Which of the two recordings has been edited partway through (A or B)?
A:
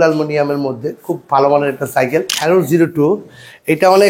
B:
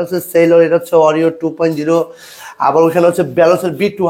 A